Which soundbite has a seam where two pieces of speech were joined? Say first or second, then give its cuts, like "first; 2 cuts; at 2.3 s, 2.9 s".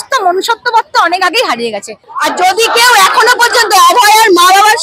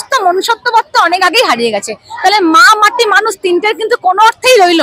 first; 1 cut; at 2.1 s